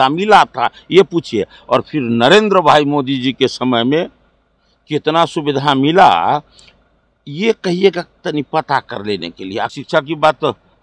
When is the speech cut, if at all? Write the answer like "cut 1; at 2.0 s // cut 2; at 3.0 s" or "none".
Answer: cut 1; at 9.8 s